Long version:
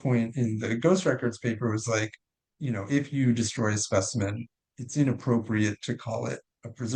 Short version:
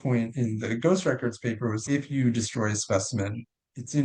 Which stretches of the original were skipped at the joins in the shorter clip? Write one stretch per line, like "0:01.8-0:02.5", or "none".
0:01.8-0:02.8